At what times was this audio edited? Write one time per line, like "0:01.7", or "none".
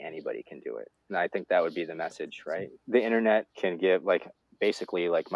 0:01.0
0:02.7
0:03.5